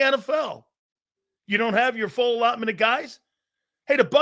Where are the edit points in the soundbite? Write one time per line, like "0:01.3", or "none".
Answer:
none